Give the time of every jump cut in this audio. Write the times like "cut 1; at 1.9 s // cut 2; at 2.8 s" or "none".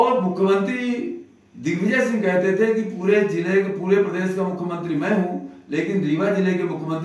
none